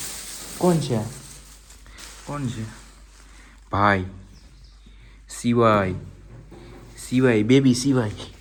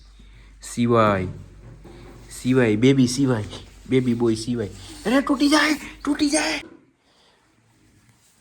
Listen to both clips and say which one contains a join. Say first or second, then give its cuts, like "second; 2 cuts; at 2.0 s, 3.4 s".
second; 1 cut; at 6.7 s